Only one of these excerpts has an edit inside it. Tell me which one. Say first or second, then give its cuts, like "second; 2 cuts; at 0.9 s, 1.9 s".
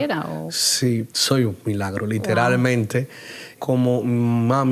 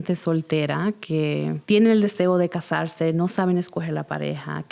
first; 2 cuts; at 1.1 s, 3.5 s